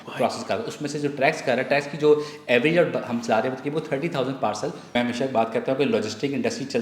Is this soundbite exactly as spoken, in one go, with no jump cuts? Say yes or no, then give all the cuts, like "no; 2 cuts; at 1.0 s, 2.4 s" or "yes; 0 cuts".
no; 1 cut; at 4.9 s